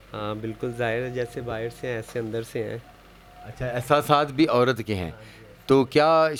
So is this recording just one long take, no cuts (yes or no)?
yes